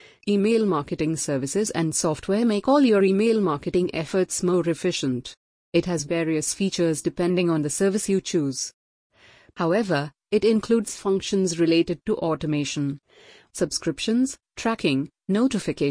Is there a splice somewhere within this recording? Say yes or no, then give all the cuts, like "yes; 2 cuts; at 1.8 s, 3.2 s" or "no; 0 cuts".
yes; 1 cut; at 0.9 s